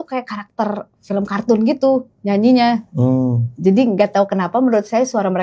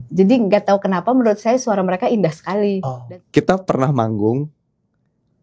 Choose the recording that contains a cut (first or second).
second